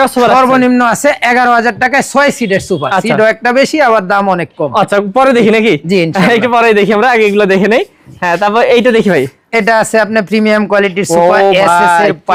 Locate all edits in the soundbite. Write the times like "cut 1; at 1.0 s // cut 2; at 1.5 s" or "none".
none